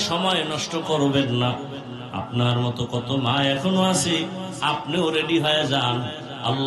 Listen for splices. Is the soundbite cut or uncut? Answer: uncut